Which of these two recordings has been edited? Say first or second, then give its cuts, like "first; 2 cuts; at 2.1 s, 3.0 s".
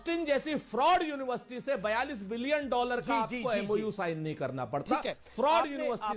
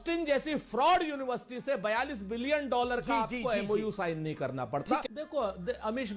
second; 1 cut; at 5.0 s